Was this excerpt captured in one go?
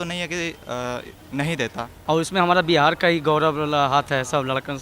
no; 1 cut; at 1.9 s

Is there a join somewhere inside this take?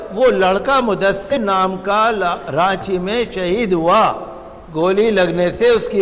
yes; 1 cut; at 1.3 s

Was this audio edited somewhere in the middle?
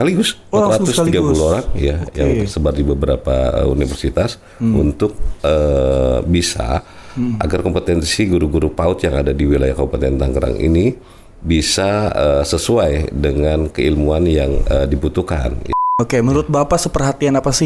yes; 1 cut; at 15.7 s

